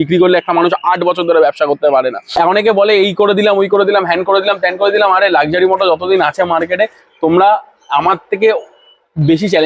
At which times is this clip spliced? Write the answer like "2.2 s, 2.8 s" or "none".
2.3 s